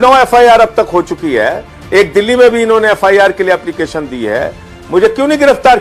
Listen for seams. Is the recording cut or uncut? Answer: uncut